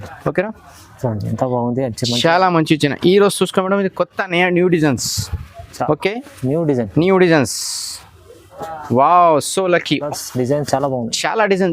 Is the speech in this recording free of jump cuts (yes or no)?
no